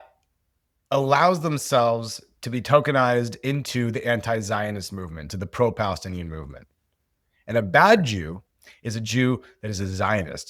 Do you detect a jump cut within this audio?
no; 0 cuts

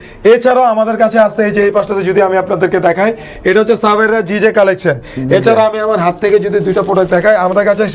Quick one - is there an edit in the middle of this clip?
no; 0 cuts

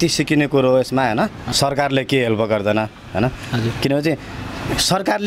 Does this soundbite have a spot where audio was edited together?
yes; 1 cut; at 1.4 s

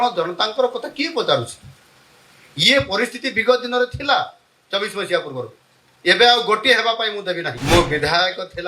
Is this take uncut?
no; 1 cut; at 7.5 s

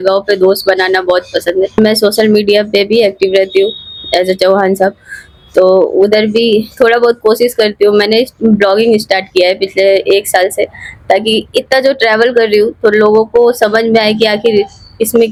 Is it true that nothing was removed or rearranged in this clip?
yes; 0 cuts

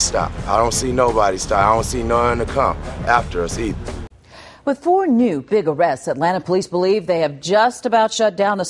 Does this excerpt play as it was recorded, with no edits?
no; 1 cut; at 3.9 s

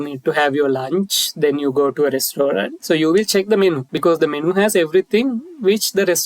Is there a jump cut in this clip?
yes; 2 cuts; at 2.7 s, 3.9 s

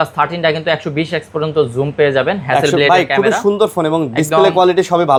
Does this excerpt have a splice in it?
no; 0 cuts

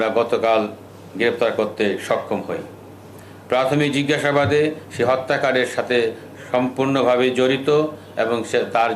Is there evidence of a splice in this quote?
no; 0 cuts

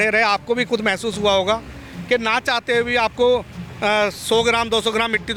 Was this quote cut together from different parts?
no; 0 cuts

